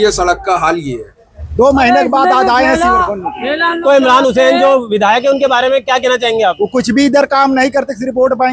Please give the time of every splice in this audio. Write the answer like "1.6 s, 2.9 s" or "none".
1.4 s